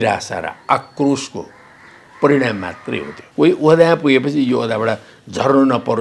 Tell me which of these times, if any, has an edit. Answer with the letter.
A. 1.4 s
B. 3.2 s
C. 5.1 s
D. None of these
B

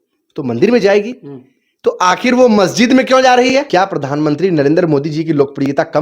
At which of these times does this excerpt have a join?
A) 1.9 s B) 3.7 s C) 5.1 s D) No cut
B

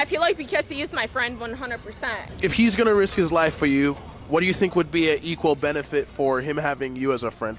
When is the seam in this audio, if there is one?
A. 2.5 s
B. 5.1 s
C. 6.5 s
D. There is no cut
A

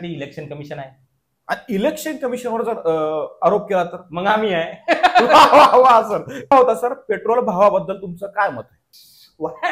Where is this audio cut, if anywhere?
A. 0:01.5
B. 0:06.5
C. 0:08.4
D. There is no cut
B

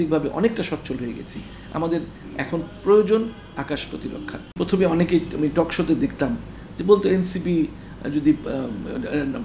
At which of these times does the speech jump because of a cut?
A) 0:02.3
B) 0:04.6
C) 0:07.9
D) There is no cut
B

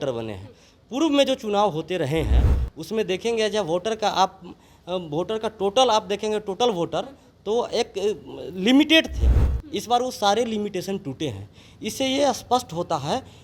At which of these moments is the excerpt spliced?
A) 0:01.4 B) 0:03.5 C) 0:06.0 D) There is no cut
D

